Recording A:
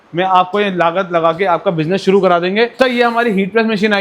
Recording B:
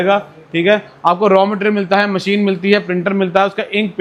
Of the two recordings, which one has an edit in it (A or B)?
A